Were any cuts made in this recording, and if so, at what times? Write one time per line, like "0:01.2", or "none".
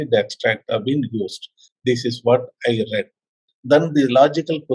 none

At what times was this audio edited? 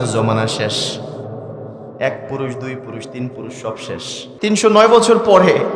0:04.4

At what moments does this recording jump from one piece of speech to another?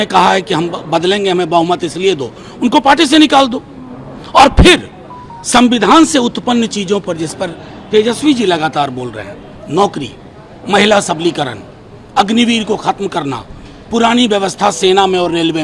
none

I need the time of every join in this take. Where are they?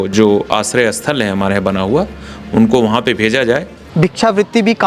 0:03.8

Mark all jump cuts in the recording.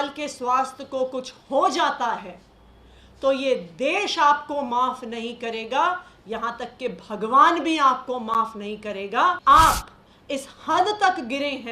0:09.4

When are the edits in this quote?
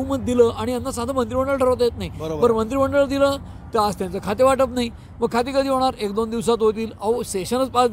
none

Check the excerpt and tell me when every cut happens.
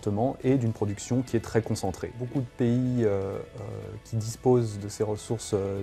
0:02.2

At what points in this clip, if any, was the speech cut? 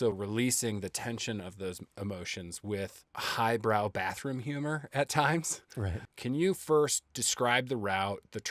0:06.0

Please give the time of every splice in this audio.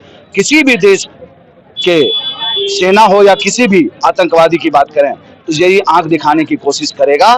none

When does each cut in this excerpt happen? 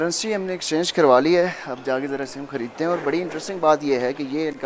none

